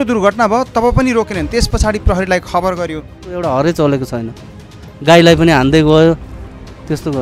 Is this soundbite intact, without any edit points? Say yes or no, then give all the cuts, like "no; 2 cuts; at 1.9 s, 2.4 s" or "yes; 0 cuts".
no; 1 cut; at 3.3 s